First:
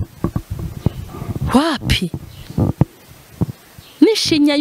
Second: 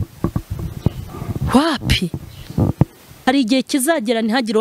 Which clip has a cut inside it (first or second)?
second